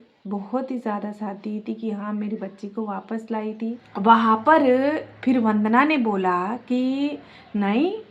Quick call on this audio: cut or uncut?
cut